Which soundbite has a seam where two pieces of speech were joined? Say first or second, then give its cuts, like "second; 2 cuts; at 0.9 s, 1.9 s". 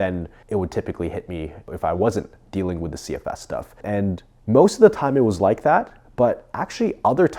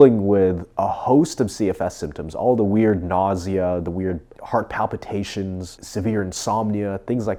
first; 1 cut; at 3.9 s